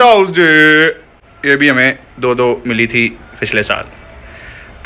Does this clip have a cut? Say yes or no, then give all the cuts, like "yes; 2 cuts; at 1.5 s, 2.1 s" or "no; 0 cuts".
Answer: no; 0 cuts